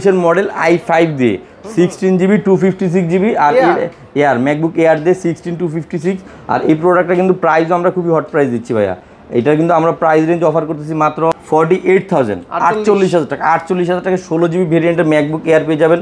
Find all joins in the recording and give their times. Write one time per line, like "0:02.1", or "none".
none